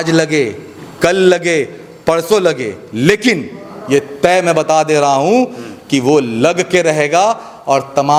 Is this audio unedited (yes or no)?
yes